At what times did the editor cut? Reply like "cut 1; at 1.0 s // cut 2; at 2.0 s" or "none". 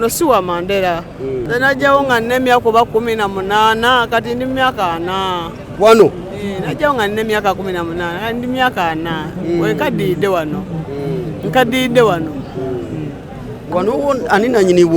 cut 1; at 1.4 s // cut 2; at 13.7 s